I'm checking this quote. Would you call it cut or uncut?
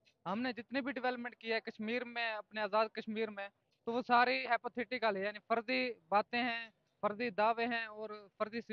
uncut